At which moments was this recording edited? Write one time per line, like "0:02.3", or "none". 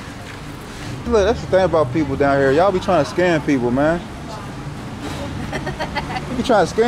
0:01.0